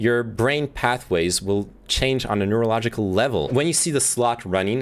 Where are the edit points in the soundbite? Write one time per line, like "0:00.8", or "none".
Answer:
0:03.5